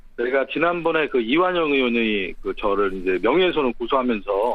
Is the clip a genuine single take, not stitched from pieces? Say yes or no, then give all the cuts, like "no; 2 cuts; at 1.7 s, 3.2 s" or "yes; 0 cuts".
no; 1 cut; at 2.3 s